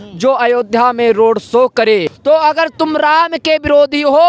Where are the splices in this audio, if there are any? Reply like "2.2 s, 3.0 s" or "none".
2.1 s